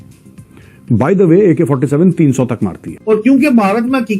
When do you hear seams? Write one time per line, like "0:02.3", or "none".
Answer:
0:02.9